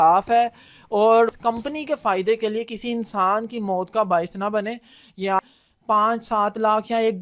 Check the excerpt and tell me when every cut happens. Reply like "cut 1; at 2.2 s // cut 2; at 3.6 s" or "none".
cut 1; at 1.3 s // cut 2; at 5.4 s